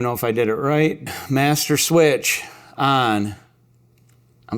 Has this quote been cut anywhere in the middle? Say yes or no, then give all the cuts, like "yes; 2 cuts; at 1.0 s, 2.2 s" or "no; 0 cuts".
yes; 1 cut; at 1.0 s